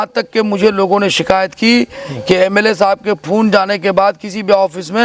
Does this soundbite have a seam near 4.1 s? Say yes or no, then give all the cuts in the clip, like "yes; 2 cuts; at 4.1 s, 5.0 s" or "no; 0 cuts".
no; 0 cuts